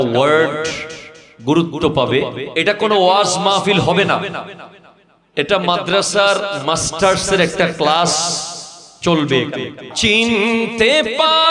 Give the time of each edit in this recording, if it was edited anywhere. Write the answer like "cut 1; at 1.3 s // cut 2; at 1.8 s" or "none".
cut 1; at 2.4 s // cut 2; at 9.8 s

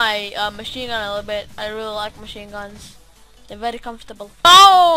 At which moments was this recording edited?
cut 1; at 1.6 s

